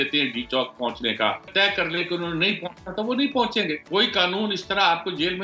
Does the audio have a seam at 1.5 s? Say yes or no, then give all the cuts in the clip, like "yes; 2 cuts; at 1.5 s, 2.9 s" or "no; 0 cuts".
yes; 2 cuts; at 1.5 s, 3.8 s